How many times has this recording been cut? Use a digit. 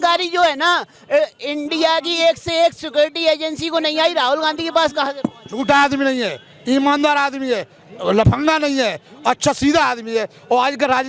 0